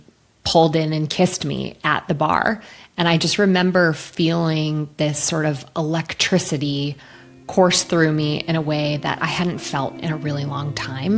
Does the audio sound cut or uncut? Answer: uncut